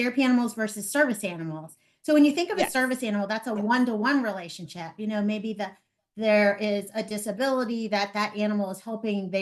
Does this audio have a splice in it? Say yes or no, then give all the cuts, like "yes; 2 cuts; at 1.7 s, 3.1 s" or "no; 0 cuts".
no; 0 cuts